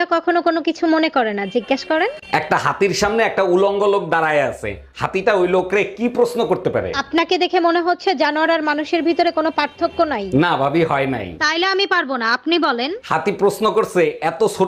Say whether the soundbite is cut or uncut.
uncut